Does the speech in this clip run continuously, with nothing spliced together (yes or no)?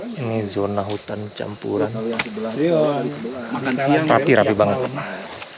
yes